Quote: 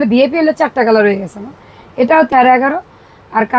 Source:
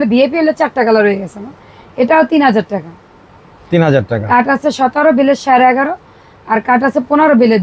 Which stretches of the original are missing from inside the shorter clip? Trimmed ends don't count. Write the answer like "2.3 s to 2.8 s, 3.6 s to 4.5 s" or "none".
2.3 s to 5.4 s